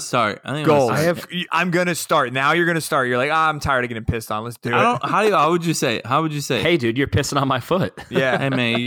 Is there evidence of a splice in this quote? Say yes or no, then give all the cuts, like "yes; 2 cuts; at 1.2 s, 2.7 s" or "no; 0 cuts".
yes; 2 cuts; at 4.5 s, 6.6 s